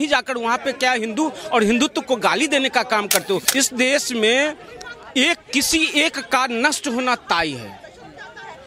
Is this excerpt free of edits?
no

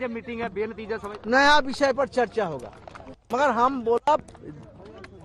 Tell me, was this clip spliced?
yes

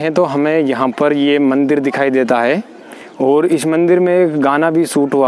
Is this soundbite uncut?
yes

